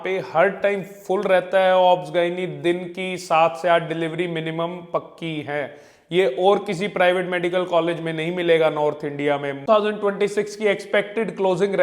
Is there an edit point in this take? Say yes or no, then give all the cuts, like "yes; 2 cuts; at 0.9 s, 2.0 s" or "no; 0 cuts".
yes; 1 cut; at 9.6 s